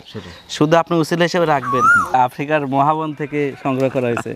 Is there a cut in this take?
yes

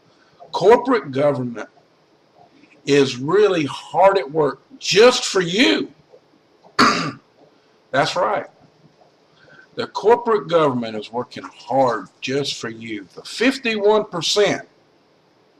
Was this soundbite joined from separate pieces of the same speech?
no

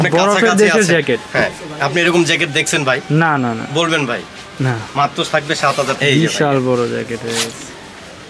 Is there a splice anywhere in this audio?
yes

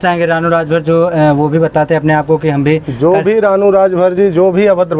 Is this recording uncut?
yes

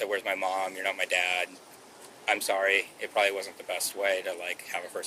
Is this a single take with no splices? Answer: yes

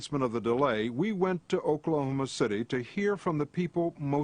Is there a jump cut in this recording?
yes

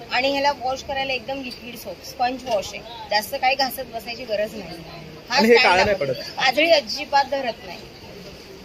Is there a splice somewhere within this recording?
no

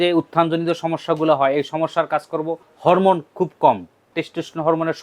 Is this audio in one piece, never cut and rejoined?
no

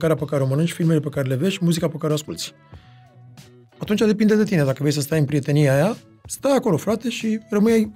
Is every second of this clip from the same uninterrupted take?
yes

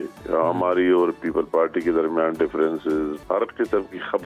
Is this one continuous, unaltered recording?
no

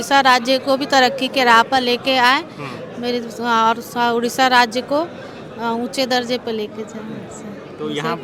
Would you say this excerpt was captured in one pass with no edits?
yes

